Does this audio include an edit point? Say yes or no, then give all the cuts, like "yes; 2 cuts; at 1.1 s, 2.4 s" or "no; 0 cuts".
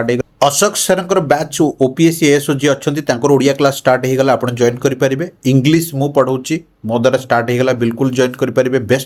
no; 0 cuts